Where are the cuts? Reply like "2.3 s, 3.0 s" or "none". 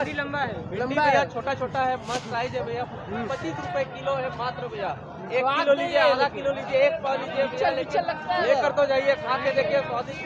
none

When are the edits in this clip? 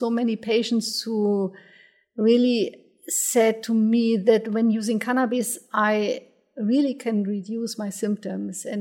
none

